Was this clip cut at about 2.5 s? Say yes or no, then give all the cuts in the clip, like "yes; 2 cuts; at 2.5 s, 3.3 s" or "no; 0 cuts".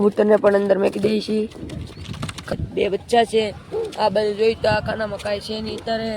yes; 1 cut; at 2.5 s